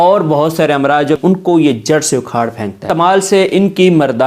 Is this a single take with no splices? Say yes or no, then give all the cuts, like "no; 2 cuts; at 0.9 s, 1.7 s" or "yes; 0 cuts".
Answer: no; 2 cuts; at 1.2 s, 2.8 s